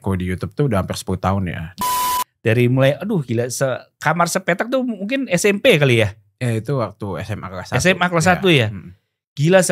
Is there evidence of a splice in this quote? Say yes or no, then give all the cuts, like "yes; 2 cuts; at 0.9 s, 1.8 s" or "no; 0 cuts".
yes; 1 cut; at 1.8 s